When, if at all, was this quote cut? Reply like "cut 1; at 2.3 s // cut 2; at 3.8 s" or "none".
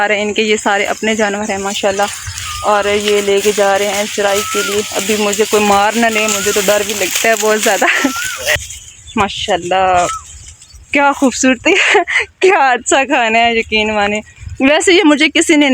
cut 1; at 8.6 s